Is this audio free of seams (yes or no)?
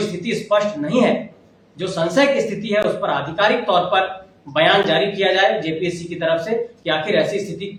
yes